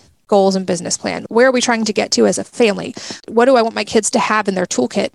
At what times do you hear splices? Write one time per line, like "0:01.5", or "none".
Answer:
0:01.2